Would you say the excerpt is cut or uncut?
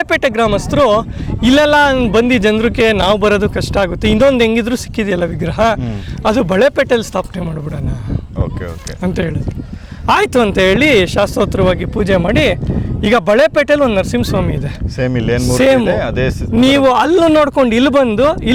uncut